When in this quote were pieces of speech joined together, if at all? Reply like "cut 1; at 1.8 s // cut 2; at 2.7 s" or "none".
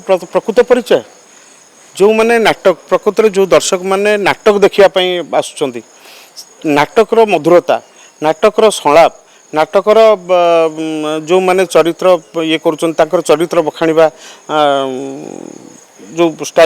none